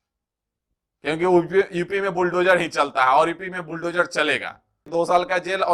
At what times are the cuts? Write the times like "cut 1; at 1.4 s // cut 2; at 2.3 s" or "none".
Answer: cut 1; at 4.8 s